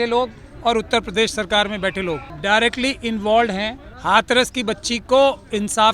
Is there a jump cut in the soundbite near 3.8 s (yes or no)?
yes